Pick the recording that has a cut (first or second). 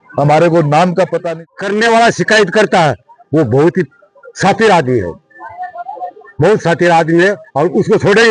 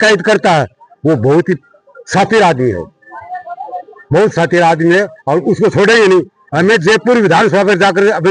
first